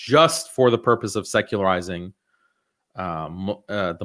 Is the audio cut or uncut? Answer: uncut